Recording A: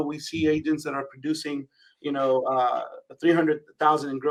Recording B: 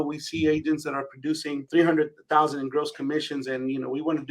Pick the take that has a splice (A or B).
B